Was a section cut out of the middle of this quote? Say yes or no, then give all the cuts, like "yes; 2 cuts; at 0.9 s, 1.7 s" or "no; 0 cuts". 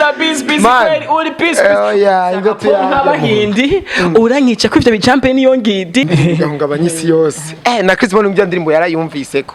yes; 1 cut; at 6.1 s